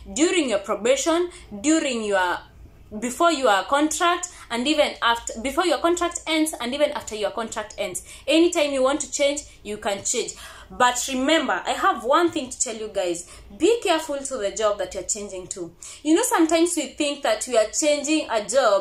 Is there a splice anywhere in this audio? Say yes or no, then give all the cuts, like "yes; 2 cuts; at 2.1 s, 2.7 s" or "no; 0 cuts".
no; 0 cuts